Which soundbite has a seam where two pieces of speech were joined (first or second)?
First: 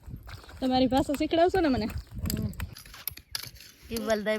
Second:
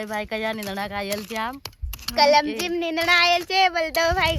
first